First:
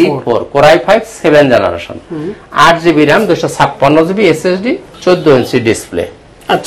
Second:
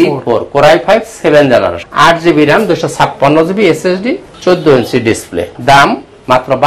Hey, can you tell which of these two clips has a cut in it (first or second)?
second